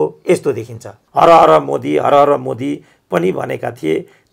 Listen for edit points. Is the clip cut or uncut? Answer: cut